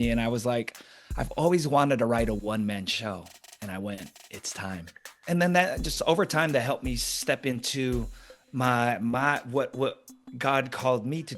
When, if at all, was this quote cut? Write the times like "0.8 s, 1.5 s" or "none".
5.1 s